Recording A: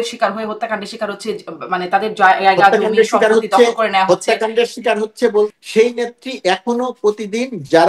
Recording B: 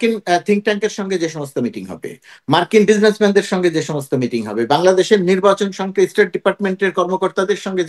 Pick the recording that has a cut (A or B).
A